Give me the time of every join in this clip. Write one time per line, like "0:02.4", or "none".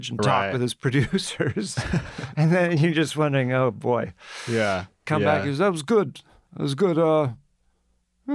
0:05.0